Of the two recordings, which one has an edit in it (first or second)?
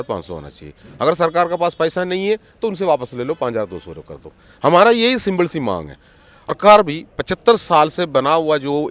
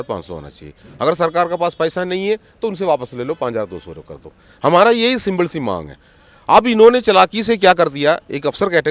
first